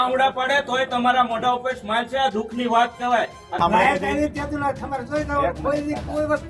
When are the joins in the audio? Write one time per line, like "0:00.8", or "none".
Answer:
none